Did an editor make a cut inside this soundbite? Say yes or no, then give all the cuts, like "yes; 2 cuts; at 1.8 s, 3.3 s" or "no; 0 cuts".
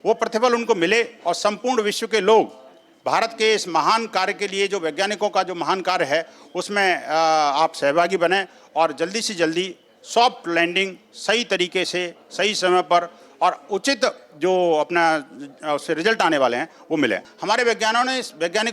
yes; 1 cut; at 17.3 s